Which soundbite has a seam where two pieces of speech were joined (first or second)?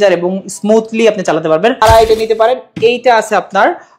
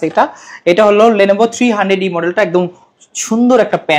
first